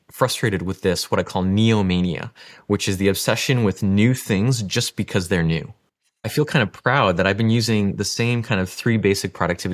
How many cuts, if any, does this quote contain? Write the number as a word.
one